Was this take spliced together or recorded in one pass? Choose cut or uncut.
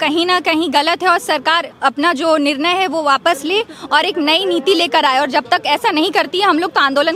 uncut